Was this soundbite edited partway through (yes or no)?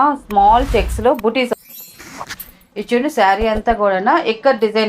yes